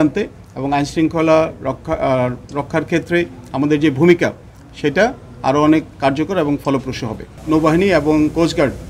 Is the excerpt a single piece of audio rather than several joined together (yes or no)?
no